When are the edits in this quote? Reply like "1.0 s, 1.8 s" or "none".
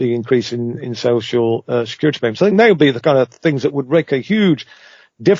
none